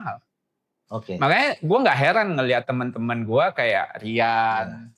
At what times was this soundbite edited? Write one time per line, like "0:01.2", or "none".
none